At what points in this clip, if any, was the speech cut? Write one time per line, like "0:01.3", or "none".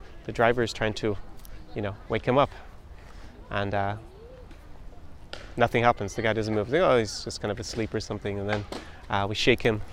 none